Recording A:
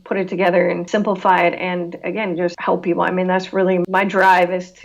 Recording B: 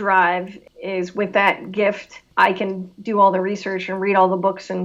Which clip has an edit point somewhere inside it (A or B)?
A